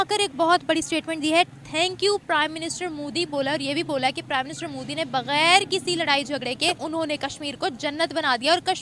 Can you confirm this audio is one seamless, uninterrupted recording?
no; 1 cut; at 6.8 s

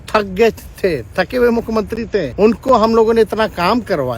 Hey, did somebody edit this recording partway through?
yes; 1 cut; at 2.3 s

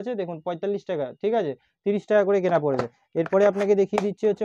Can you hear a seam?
no; 0 cuts

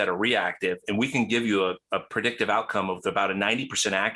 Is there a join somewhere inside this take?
no; 0 cuts

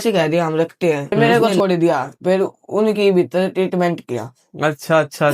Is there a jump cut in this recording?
yes; 1 cut; at 1.3 s

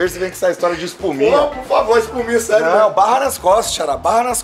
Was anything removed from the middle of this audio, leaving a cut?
no; 0 cuts

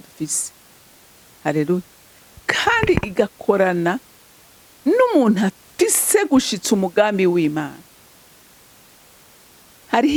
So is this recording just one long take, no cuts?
yes; 0 cuts

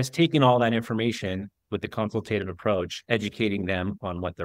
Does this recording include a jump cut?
yes; 2 cuts; at 1.5 s, 3.0 s

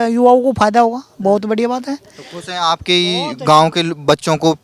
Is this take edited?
no; 0 cuts

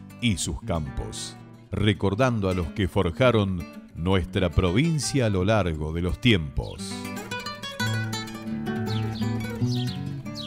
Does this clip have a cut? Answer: yes; 1 cut; at 6.8 s

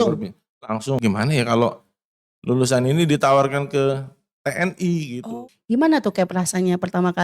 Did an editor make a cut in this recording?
yes; 2 cuts; at 1.0 s, 5.6 s

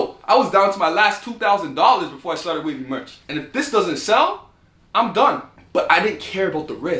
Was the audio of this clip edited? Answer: yes; 2 cuts; at 3.2 s, 5.5 s

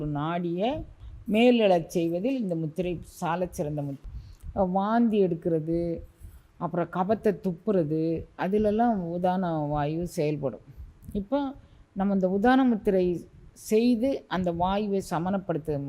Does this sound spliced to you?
yes; 1 cut; at 4.0 s

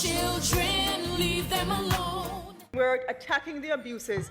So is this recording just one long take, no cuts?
no; 1 cut; at 2.5 s

